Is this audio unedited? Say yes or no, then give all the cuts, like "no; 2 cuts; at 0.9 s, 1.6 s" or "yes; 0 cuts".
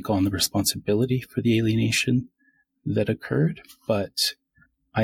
yes; 0 cuts